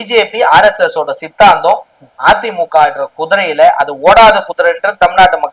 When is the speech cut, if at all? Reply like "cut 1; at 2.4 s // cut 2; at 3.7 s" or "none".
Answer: none